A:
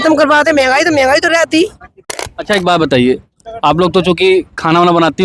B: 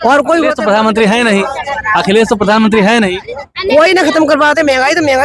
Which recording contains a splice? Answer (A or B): A